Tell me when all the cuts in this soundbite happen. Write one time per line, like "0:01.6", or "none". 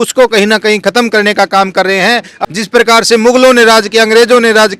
0:02.5